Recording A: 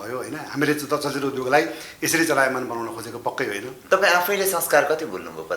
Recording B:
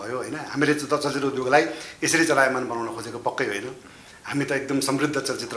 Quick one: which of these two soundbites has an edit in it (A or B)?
A